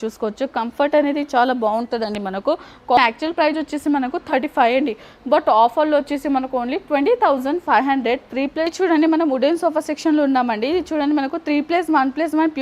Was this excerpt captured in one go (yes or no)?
no